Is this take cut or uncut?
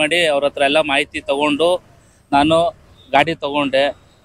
uncut